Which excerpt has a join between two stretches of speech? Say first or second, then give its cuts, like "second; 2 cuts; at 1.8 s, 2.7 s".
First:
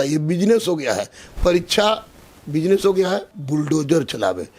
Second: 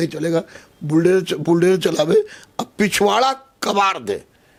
first; 1 cut; at 3.3 s